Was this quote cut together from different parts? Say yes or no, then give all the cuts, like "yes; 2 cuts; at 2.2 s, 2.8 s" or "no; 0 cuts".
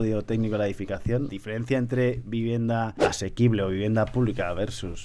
yes; 2 cuts; at 1.3 s, 3.0 s